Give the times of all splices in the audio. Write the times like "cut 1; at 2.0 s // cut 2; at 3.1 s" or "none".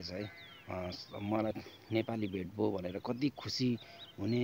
cut 1; at 1.5 s